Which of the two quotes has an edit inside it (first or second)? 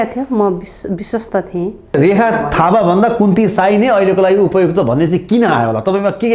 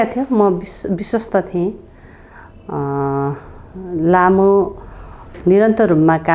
first